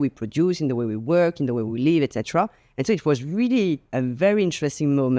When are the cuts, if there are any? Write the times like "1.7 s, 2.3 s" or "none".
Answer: none